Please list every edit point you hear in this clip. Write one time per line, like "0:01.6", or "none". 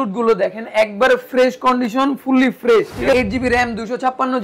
0:03.1